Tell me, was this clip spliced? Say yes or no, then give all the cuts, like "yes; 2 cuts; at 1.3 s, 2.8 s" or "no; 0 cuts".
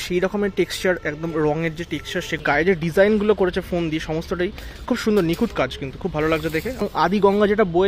yes; 2 cuts; at 2.7 s, 7.1 s